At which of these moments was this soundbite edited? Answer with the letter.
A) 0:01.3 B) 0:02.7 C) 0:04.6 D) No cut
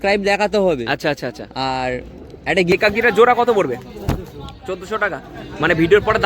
B